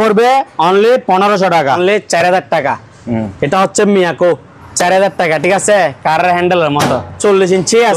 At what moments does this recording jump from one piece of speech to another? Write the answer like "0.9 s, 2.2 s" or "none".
1.8 s, 7.1 s